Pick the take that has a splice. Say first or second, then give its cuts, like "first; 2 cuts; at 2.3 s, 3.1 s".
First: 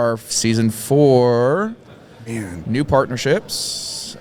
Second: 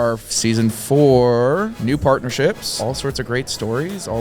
second; 2 cuts; at 1.8 s, 2.8 s